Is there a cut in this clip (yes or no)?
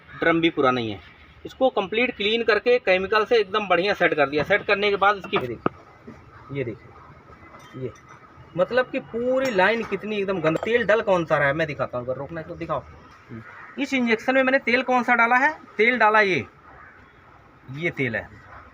yes